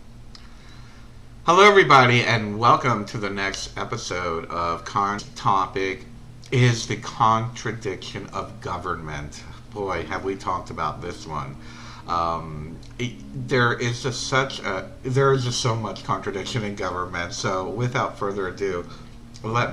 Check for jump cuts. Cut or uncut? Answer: uncut